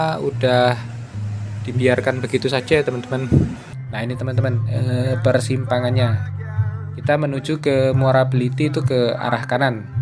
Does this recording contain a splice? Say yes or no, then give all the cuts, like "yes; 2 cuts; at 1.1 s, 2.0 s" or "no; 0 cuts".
yes; 1 cut; at 3.7 s